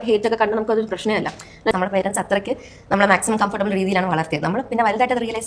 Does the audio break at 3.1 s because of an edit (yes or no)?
no